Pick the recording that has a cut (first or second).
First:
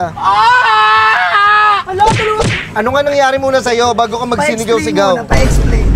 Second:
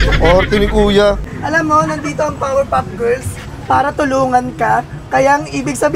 second